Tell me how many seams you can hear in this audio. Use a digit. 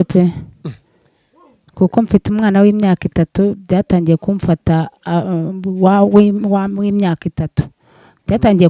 0